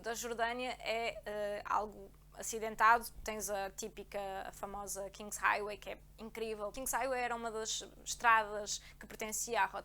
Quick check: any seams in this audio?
yes; 1 cut; at 6.7 s

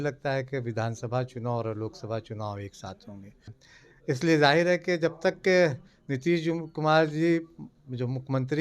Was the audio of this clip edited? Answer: yes; 1 cut; at 3.6 s

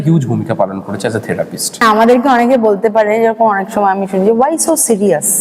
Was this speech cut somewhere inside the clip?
yes; 1 cut; at 1.8 s

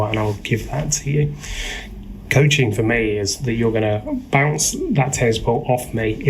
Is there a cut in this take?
no; 0 cuts

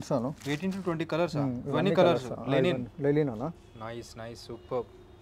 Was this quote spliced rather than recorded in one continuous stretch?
no; 0 cuts

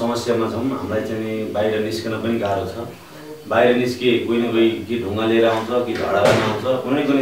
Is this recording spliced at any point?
no; 0 cuts

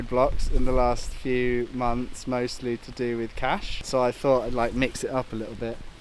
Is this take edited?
yes; 1 cut; at 3.7 s

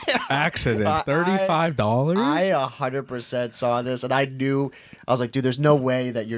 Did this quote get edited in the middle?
no; 0 cuts

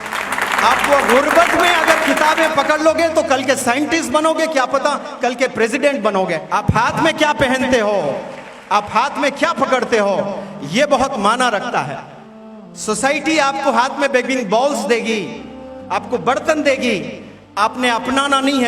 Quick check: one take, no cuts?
no; 1 cut; at 6.4 s

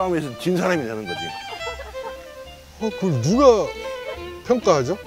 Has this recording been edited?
no; 0 cuts

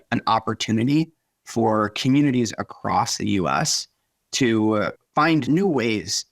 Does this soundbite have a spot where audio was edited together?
yes; 1 cut; at 5.4 s

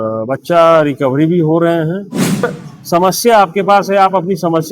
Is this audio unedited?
no; 1 cut; at 2.4 s

